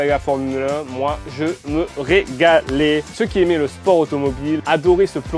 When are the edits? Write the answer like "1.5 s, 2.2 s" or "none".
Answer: 3.1 s, 4.6 s